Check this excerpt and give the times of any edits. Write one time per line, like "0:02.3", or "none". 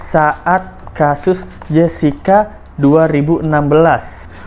none